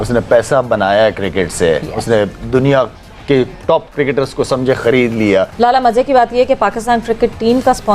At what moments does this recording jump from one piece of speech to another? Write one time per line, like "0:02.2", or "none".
0:05.5